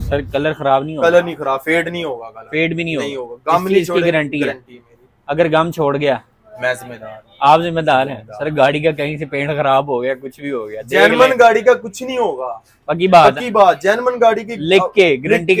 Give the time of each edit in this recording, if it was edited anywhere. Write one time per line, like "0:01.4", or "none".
none